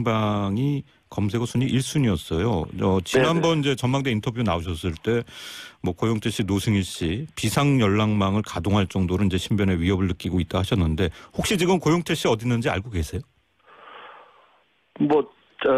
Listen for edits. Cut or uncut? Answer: cut